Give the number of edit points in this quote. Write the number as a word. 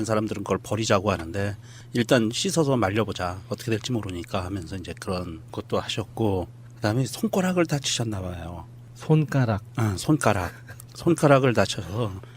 one